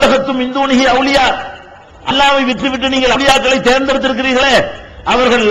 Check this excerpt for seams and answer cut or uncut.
cut